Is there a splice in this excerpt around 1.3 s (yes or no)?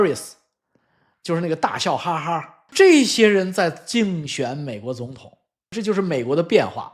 no